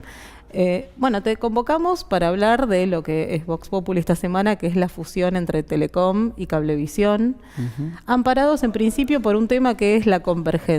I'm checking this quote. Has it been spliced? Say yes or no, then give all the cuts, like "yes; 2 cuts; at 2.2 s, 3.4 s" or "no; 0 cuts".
yes; 1 cut; at 8.4 s